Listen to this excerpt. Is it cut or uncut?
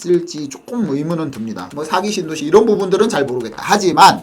cut